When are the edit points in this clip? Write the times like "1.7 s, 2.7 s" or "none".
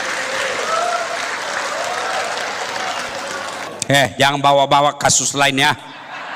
3.7 s